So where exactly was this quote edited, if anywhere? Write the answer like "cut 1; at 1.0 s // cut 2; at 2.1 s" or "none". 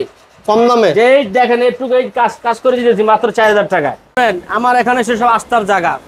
cut 1; at 4.1 s